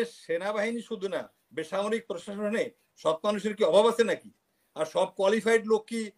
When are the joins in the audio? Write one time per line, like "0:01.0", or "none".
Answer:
none